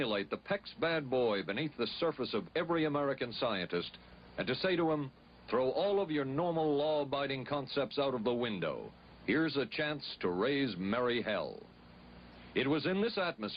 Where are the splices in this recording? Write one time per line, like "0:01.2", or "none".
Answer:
none